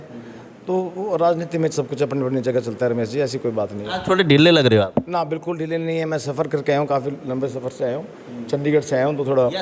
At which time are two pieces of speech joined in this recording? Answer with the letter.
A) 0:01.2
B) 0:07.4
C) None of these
C